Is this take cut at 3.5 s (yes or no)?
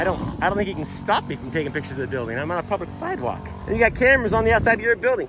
yes